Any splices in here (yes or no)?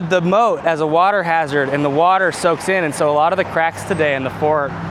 no